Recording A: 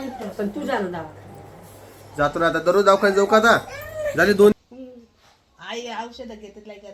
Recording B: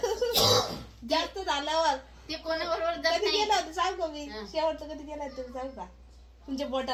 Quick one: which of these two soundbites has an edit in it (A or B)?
A